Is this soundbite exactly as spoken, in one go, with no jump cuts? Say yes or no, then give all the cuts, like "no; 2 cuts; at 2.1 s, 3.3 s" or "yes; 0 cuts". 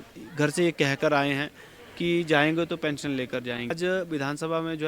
no; 1 cut; at 3.7 s